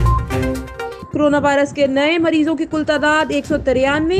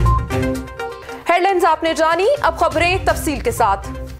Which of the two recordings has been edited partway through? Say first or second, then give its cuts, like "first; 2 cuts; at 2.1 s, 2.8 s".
first; 1 cut; at 1.0 s